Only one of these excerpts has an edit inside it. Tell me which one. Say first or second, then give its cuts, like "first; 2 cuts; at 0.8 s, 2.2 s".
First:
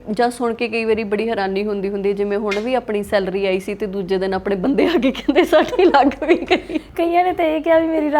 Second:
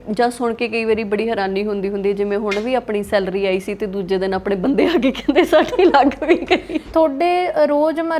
second; 1 cut; at 6.8 s